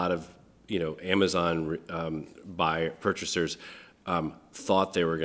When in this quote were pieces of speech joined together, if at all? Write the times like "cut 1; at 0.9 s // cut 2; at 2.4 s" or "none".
none